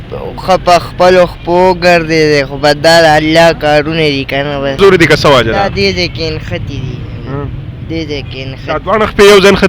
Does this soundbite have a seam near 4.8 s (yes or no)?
yes